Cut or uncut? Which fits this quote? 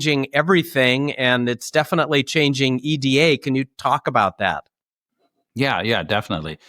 uncut